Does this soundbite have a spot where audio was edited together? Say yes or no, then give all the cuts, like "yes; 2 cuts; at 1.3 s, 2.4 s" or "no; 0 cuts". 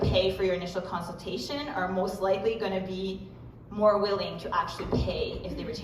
no; 0 cuts